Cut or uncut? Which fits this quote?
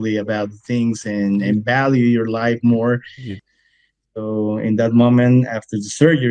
cut